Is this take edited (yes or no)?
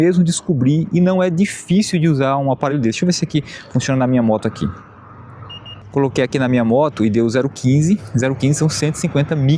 no